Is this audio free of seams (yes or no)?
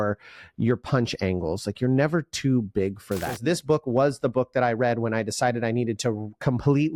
no